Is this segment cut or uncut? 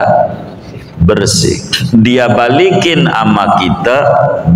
uncut